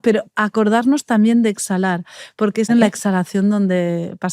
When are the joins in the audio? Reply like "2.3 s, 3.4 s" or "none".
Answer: 2.7 s

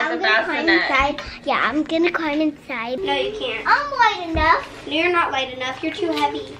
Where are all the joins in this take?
2.9 s

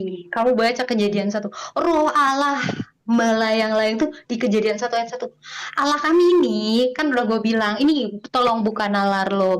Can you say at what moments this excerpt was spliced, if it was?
none

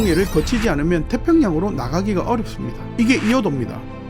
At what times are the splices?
2.8 s

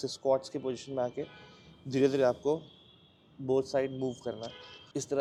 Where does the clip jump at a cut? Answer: none

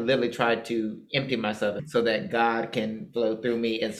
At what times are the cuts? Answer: 1.8 s

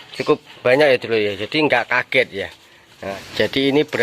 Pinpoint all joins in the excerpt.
3.0 s

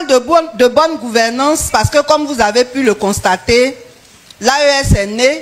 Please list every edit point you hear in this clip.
none

